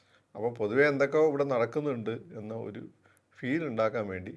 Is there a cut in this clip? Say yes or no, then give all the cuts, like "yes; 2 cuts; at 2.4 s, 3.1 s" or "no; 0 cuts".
no; 0 cuts